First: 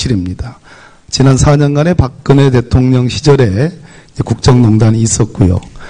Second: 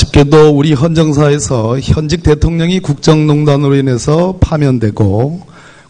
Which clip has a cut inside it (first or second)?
first